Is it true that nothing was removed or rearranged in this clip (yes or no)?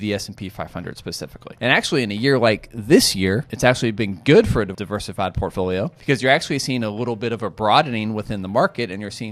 no